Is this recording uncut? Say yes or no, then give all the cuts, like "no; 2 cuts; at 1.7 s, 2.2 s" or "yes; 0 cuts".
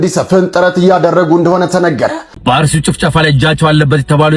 no; 1 cut; at 2.3 s